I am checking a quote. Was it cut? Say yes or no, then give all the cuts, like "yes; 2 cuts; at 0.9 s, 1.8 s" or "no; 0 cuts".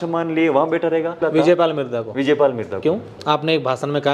yes; 2 cuts; at 1.2 s, 3.1 s